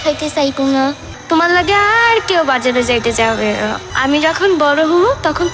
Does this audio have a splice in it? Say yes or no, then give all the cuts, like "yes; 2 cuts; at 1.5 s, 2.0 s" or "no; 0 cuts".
yes; 2 cuts; at 1.1 s, 3.9 s